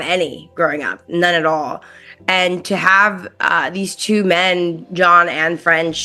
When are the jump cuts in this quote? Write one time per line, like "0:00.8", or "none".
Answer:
none